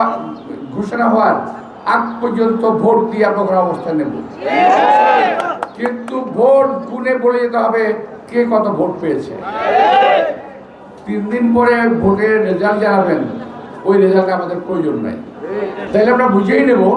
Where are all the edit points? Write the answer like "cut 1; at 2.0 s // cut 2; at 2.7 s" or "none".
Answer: cut 1; at 15.8 s